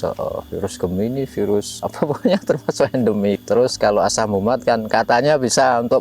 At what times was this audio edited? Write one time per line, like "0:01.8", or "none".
0:01.8
0:03.4